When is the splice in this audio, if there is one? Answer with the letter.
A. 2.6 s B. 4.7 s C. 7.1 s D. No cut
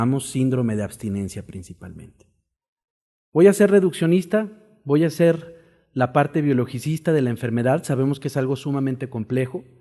D